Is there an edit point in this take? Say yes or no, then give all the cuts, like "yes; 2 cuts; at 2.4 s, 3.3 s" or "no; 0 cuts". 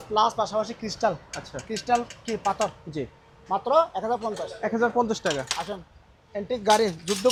no; 0 cuts